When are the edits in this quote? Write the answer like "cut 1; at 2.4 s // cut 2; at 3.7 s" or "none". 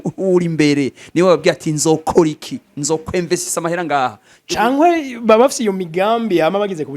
cut 1; at 4.3 s